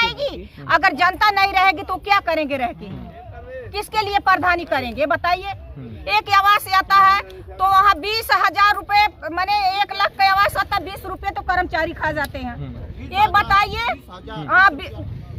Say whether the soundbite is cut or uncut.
uncut